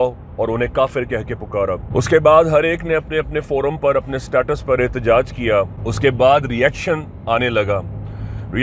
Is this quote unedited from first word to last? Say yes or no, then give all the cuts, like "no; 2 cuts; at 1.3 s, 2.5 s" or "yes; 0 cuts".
no; 2 cuts; at 1.8 s, 5.8 s